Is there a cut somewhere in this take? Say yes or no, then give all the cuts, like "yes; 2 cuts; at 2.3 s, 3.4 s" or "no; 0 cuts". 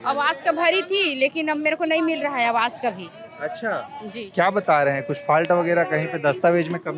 no; 0 cuts